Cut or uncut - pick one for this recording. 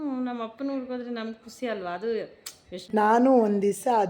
cut